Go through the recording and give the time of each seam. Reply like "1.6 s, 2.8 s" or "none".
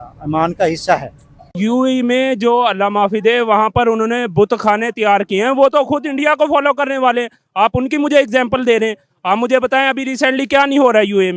1.6 s